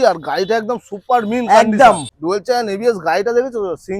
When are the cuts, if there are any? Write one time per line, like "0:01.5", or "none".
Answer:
0:02.1

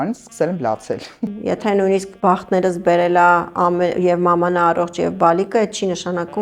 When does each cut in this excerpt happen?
0:01.3
0:02.2

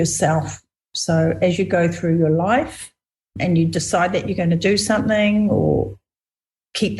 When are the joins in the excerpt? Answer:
0:03.4

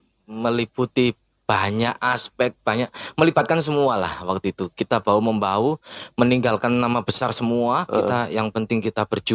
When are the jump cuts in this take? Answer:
none

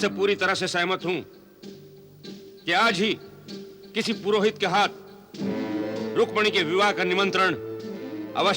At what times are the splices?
none

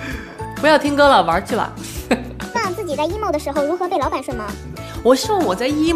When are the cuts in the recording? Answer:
0:02.6

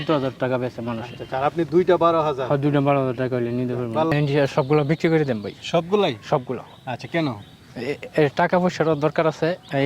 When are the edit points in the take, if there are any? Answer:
0:04.1

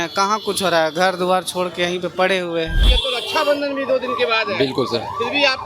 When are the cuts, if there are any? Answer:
0:02.8

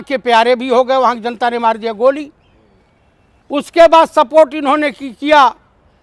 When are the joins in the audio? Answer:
none

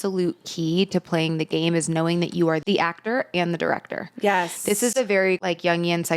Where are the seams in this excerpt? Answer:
0:02.6
0:05.4

